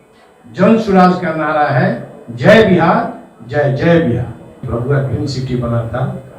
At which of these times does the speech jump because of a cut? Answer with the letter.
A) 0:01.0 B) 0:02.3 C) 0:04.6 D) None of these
C